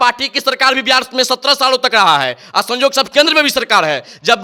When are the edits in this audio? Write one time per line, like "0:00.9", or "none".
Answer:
none